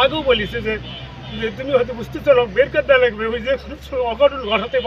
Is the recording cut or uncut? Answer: uncut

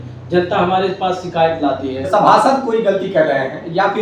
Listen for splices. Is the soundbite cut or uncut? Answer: cut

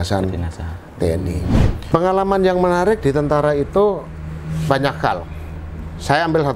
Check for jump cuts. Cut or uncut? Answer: cut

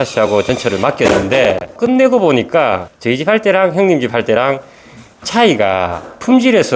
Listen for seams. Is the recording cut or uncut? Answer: cut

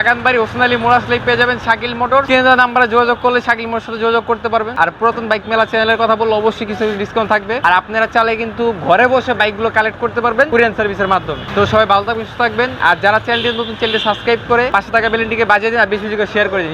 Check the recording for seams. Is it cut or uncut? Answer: cut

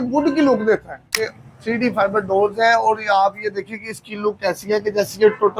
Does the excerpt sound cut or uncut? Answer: cut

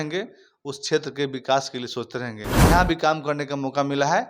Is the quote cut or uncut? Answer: cut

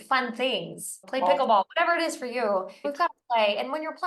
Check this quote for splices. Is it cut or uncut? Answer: cut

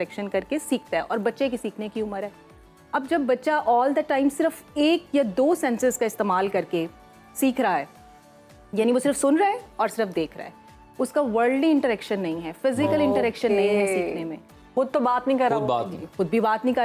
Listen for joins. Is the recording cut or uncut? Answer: uncut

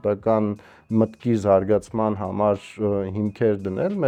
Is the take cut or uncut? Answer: uncut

